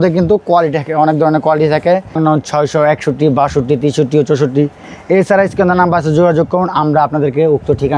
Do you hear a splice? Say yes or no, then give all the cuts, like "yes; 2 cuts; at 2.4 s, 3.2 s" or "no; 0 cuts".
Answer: yes; 1 cut; at 2.2 s